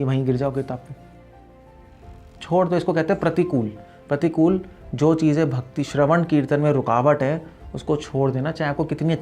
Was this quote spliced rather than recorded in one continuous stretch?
no; 0 cuts

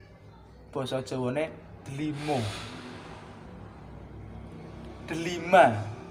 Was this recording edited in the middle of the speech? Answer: no; 0 cuts

